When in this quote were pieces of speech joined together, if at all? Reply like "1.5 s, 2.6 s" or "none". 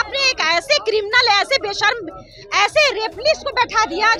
none